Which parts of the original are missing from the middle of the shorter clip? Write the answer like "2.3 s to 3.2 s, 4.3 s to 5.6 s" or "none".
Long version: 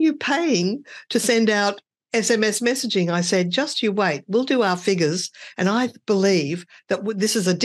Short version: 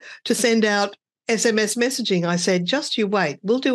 none